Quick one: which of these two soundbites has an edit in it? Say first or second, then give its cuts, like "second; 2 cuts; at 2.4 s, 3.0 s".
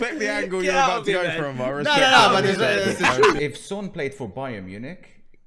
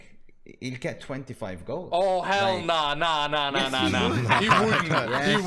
first; 1 cut; at 3.4 s